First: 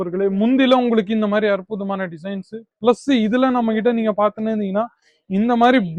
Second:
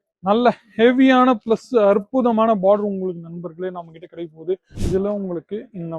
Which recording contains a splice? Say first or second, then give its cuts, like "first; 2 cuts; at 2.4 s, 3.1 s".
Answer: second; 1 cut; at 4.7 s